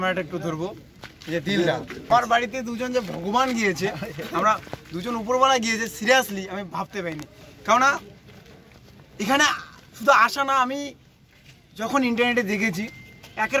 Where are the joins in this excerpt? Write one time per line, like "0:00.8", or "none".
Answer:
0:02.1